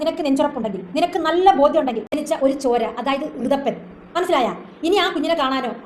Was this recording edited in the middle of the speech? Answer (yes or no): yes